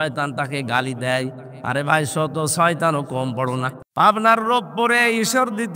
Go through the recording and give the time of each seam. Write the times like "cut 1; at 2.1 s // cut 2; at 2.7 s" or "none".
cut 1; at 3.8 s